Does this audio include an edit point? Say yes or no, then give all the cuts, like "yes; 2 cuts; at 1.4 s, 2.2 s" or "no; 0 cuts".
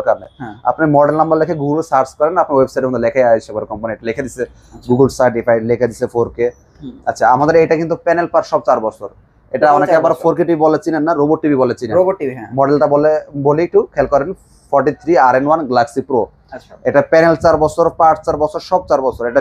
no; 0 cuts